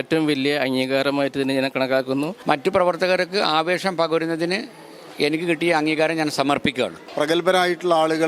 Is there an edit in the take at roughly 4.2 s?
no; 2 cuts; at 2.4 s, 7.0 s

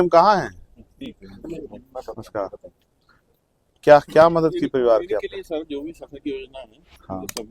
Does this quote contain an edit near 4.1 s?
no; 1 cut; at 1.0 s

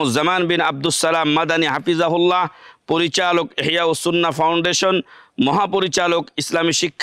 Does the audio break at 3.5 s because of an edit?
no; 0 cuts

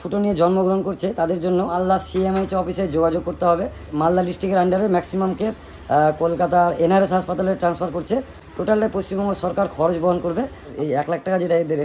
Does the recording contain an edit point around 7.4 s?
no; 3 cuts; at 1.8 s, 3.9 s, 10.7 s

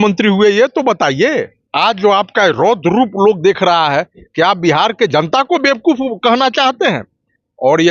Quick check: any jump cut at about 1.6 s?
yes; 1 cut; at 1.6 s

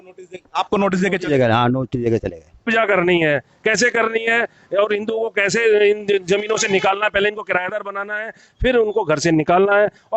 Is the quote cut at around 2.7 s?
yes; 1 cut; at 2.7 s

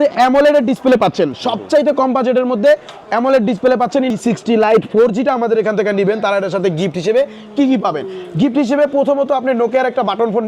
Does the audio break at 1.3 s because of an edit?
no; 1 cut; at 4.1 s

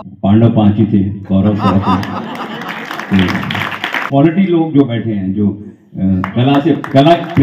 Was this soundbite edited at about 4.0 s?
yes; 1 cut; at 4.0 s

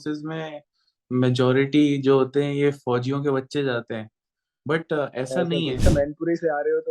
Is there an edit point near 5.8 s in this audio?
yes; 1 cut; at 5.8 s

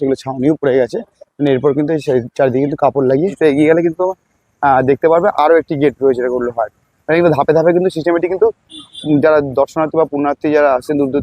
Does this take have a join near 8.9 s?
no; 1 cut; at 3.3 s

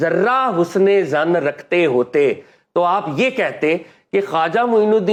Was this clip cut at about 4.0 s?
no; 0 cuts

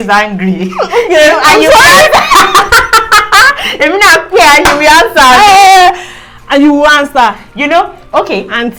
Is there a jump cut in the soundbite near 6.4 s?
no; 0 cuts

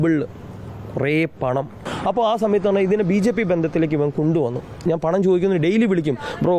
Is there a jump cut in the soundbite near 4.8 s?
yes; 2 cuts; at 1.9 s, 4.8 s

